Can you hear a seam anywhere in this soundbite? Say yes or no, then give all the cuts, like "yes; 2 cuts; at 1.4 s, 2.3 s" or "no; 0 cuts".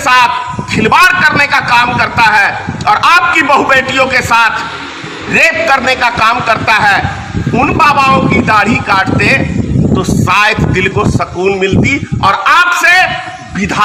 no; 0 cuts